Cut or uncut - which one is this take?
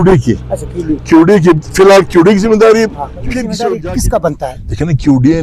cut